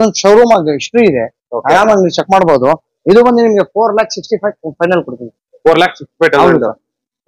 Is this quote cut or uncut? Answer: uncut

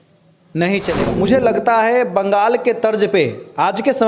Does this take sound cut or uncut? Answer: cut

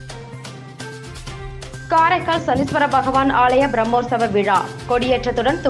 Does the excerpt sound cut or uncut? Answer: uncut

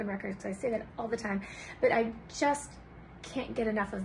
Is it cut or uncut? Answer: uncut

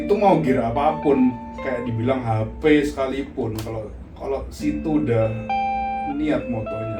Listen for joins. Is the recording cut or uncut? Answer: uncut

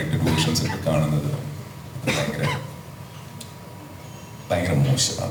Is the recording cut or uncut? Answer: uncut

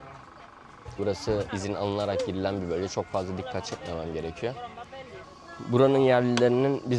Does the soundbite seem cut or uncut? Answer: cut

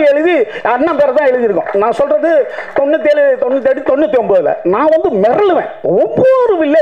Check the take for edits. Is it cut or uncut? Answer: uncut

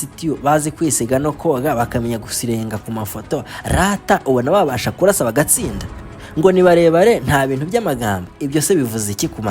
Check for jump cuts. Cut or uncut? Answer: uncut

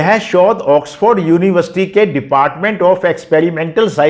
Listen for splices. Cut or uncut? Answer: uncut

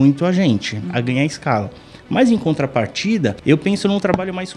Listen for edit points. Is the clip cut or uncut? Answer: cut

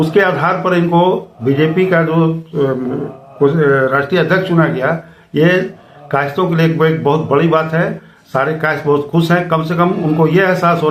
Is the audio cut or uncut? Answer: uncut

